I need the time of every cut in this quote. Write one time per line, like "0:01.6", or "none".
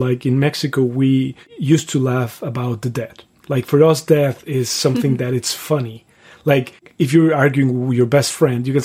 0:01.5
0:06.8